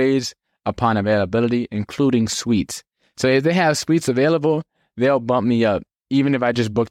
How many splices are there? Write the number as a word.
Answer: one